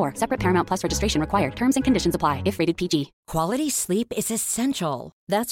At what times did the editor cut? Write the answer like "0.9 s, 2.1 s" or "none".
3.2 s

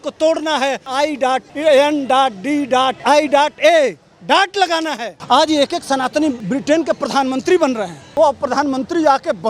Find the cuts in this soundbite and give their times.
1.0 s, 3.0 s, 5.1 s, 6.4 s, 8.2 s

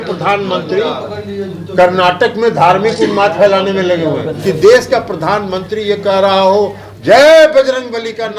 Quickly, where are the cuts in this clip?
4.3 s

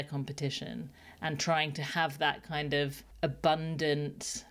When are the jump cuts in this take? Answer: 3.0 s

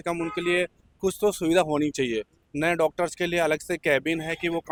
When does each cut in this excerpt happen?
none

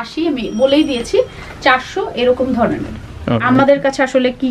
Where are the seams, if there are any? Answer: 3.4 s

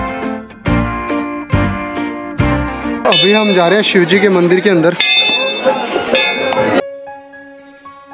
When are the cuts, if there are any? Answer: none

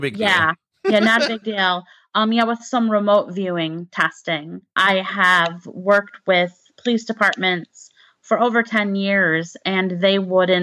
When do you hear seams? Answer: 4.7 s

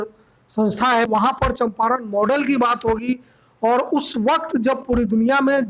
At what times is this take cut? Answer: 1.1 s

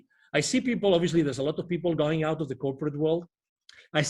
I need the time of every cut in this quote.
none

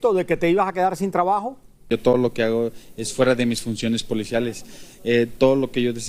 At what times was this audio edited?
1.9 s

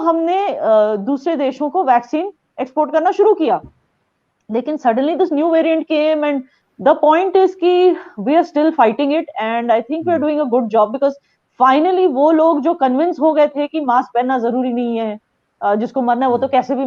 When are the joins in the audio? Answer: none

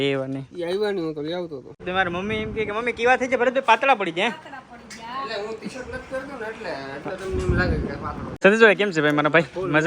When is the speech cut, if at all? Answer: 1.9 s, 8.4 s

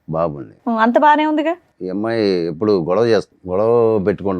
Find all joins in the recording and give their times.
1.7 s, 3.4 s

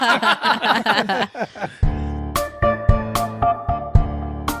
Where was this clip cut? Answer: 1.6 s

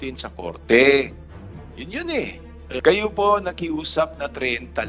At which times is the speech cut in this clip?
2.8 s

